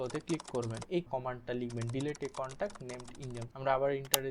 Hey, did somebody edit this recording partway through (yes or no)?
yes